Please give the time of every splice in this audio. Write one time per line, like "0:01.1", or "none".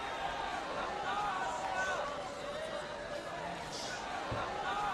none